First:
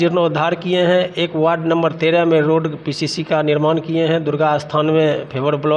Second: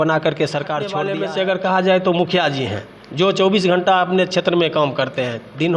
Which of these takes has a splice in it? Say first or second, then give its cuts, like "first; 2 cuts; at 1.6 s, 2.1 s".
second; 1 cut; at 1.0 s